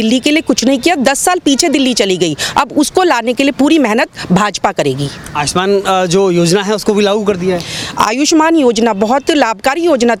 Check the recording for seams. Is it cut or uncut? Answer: uncut